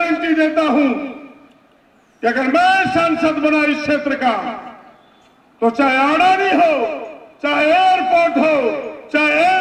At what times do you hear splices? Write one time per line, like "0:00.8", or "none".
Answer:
none